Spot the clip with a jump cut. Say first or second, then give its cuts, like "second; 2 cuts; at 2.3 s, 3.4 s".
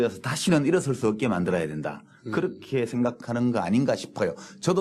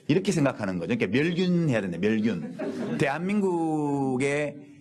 first; 1 cut; at 3.6 s